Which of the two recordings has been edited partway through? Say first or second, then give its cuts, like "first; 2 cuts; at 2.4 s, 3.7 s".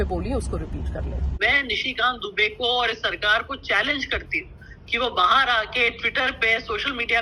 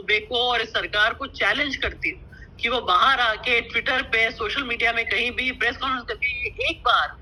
first; 1 cut; at 1.4 s